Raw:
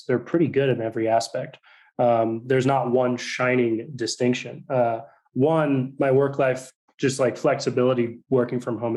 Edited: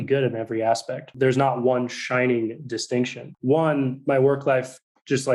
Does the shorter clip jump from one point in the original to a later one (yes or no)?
yes